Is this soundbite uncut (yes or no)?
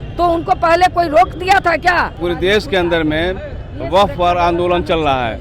no